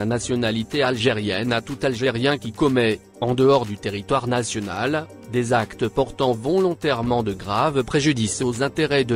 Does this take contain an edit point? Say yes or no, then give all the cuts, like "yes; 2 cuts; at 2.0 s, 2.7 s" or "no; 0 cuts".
yes; 1 cut; at 1.5 s